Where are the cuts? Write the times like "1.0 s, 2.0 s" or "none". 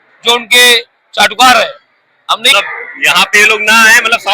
2.5 s